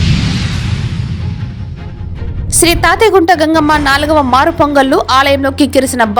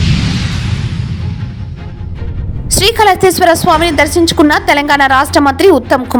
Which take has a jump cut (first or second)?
first